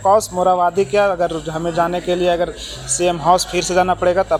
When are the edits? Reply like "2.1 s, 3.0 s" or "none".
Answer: none